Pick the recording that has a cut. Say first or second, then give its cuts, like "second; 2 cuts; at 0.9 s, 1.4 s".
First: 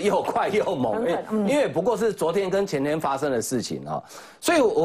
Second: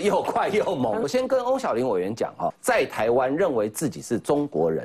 second; 2 cuts; at 1.1 s, 2.6 s